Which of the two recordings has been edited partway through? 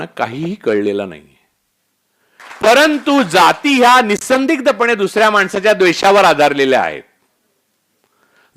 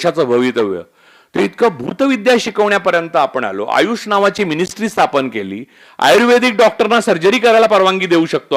first; 1 cut; at 2.4 s

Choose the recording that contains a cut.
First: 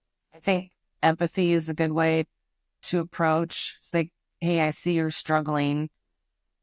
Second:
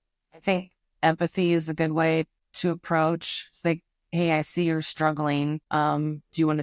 second; 2 cuts; at 2.4 s, 5.6 s

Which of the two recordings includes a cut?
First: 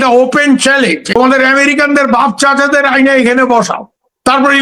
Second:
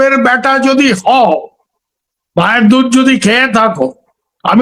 first; 1 cut; at 1.0 s

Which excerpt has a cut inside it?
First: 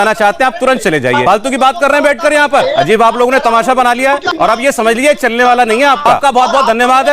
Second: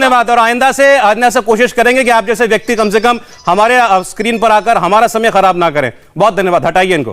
first; 4 cuts; at 1.2 s, 2.7 s, 4.3 s, 6.1 s

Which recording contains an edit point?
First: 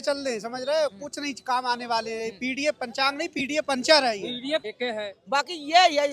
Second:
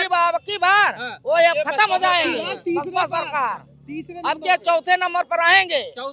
first; 1 cut; at 4.6 s

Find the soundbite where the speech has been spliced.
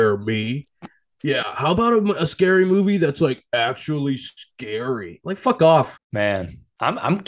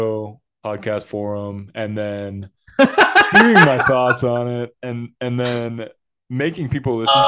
first; 1 cut; at 6.2 s

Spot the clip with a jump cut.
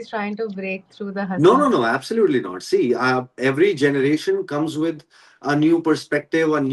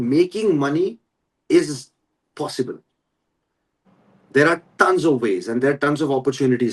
first; 1 cut; at 1.3 s

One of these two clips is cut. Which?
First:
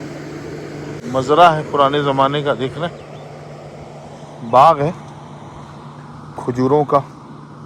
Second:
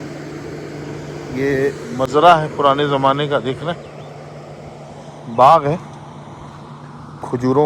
first; 1 cut; at 1.0 s

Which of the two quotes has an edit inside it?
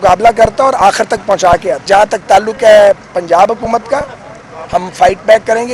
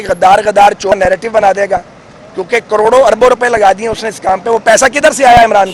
first; 1 cut; at 1.9 s

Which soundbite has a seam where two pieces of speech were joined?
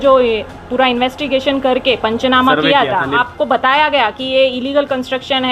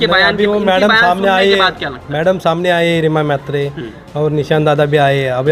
first; 1 cut; at 3.2 s

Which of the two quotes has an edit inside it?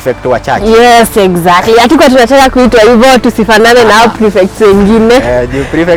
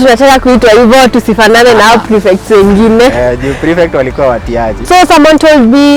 second; 1 cut; at 4.8 s

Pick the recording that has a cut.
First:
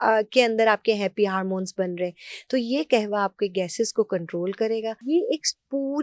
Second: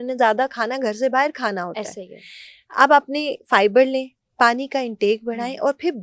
first; 1 cut; at 5.0 s

